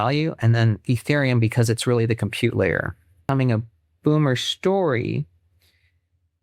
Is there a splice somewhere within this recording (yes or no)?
yes